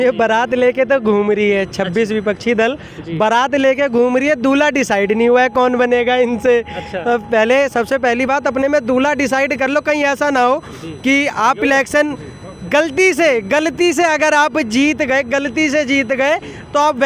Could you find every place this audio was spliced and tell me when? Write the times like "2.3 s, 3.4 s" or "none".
none